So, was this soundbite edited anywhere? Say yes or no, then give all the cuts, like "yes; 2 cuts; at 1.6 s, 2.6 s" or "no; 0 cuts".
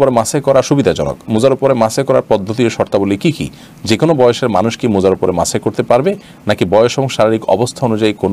no; 0 cuts